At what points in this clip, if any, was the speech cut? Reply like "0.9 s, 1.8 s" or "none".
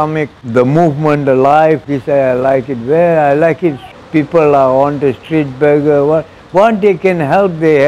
1.8 s, 3.9 s